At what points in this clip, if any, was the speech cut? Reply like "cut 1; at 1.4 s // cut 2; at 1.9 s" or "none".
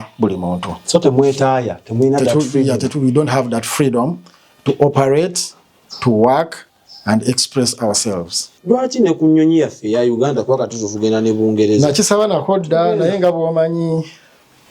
cut 1; at 8.5 s